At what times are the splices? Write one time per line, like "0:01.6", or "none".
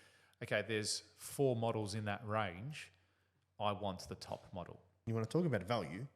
0:05.1